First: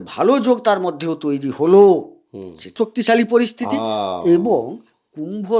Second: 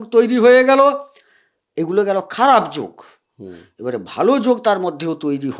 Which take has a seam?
first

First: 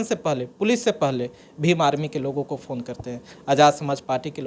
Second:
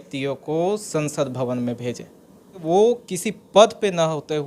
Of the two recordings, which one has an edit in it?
second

